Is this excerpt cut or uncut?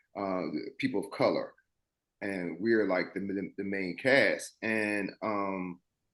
uncut